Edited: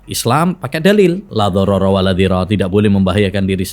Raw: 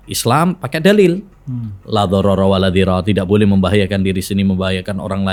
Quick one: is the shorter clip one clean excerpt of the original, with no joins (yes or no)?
no